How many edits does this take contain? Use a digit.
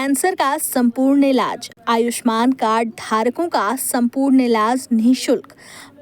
0